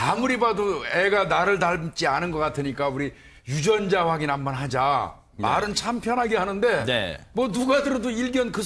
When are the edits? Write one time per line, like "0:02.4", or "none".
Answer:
0:06.7